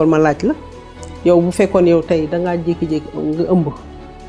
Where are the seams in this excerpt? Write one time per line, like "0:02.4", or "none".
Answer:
none